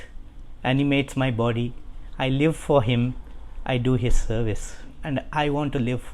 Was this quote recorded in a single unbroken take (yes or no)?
no